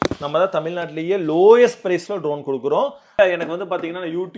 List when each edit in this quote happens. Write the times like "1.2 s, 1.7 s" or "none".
3.2 s